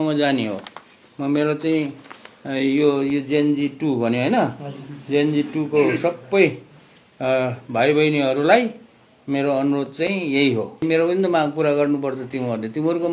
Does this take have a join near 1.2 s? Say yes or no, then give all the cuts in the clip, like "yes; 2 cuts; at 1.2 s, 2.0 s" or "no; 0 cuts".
no; 1 cut; at 10.8 s